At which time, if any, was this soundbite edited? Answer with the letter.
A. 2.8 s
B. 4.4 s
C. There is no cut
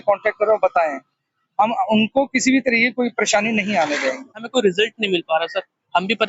B